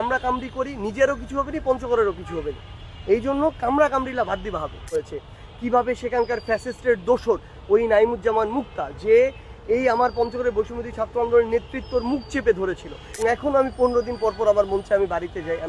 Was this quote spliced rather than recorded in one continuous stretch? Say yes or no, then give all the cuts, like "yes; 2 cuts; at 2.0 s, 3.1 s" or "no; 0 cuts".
yes; 2 cuts; at 4.9 s, 13.0 s